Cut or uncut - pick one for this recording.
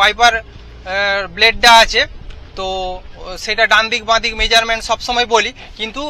uncut